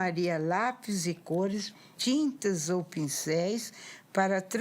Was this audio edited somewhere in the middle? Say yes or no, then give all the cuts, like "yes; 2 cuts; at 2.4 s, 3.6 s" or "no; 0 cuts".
yes; 1 cut; at 1.8 s